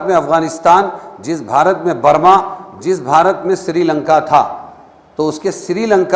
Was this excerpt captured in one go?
yes; 0 cuts

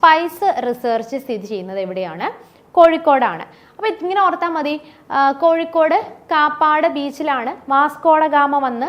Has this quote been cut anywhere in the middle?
no; 0 cuts

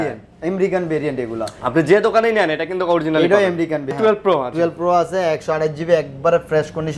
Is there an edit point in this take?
yes; 1 cut; at 3.9 s

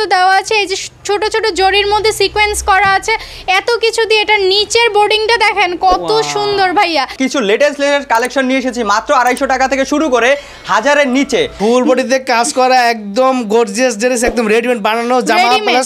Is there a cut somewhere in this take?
yes; 2 cuts; at 7.1 s, 11.6 s

